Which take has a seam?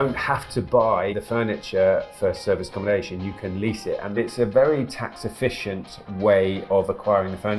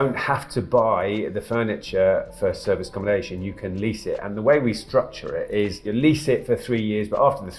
first; 2 cuts; at 1.1 s, 4.2 s

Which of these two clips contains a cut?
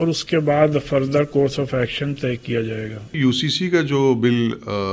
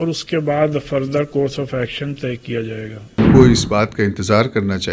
second; 1 cut; at 3.2 s

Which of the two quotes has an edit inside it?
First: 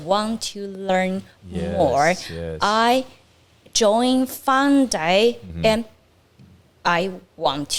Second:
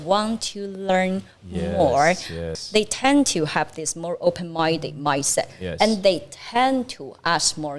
second; 1 cut; at 2.5 s

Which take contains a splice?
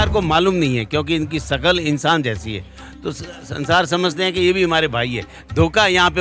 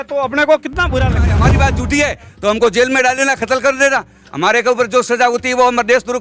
second; 1 cut; at 1.2 s

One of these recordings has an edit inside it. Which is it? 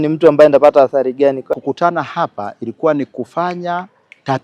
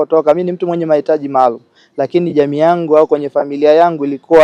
first; 1 cut; at 1.5 s

